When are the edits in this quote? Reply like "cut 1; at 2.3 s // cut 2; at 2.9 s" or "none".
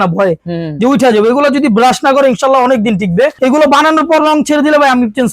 cut 1; at 3.3 s